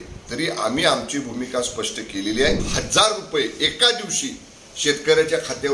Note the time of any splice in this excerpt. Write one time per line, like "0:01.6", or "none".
0:02.7